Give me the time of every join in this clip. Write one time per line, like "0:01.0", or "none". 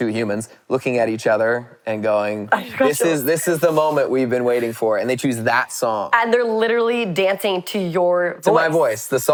none